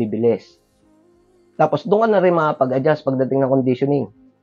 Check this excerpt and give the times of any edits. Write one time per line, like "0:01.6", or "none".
none

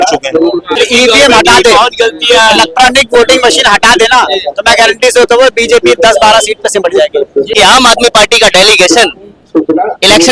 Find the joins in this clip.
0:00.8
0:07.5

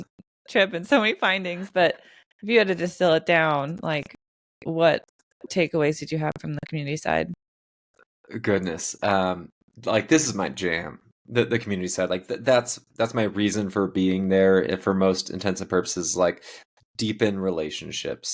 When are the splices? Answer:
0:05.5

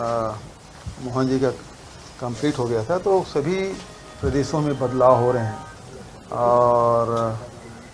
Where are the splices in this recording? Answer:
none

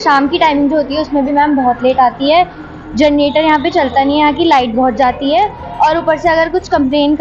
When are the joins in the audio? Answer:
none

